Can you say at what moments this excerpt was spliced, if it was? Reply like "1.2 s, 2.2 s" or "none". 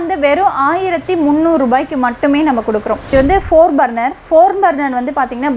3.0 s